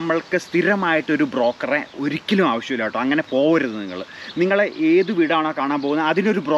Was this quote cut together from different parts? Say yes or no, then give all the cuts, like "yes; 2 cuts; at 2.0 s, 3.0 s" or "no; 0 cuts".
no; 0 cuts